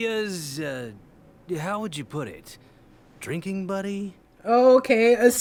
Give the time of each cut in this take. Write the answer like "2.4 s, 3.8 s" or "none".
none